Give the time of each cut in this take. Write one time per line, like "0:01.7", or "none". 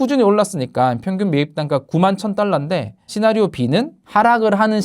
0:03.0